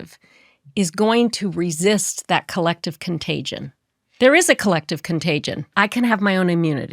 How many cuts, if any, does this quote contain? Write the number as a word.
one